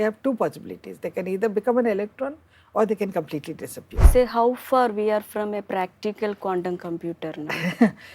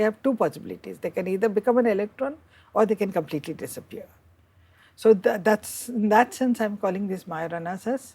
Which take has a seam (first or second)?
first